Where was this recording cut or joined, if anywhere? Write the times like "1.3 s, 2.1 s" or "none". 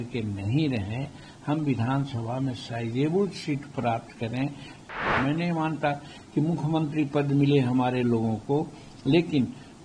5.0 s